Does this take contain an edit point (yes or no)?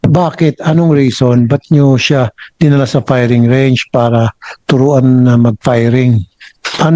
no